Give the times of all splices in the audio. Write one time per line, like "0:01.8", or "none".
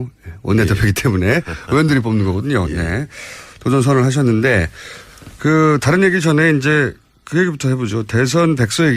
0:08.0